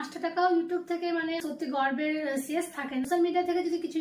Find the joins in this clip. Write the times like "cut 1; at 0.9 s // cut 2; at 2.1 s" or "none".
cut 1; at 1.4 s // cut 2; at 3.0 s